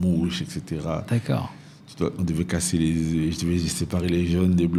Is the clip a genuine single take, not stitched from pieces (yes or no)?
yes